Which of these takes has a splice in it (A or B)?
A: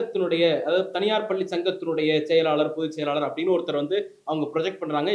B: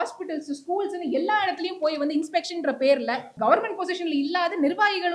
B